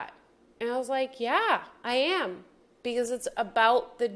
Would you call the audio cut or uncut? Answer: cut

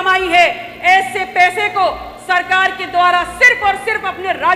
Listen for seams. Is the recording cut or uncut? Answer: uncut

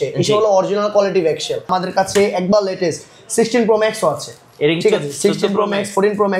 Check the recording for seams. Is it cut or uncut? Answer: cut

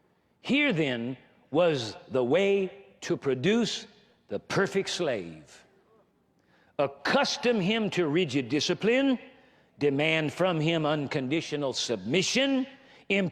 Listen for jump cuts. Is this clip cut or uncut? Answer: uncut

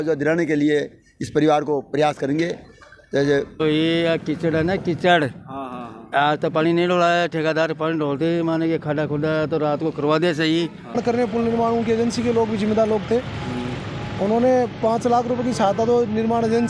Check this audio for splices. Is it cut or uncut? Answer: cut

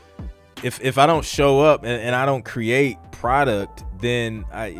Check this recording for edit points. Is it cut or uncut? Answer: uncut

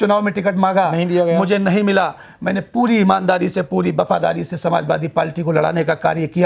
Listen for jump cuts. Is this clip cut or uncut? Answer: uncut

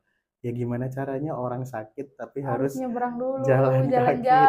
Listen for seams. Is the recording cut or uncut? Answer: uncut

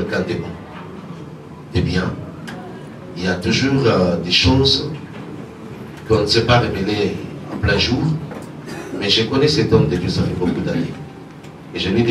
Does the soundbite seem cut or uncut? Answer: uncut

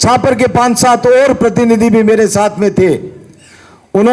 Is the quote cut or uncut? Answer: uncut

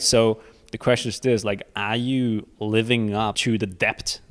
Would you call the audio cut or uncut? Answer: cut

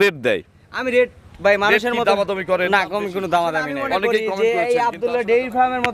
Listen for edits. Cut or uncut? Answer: cut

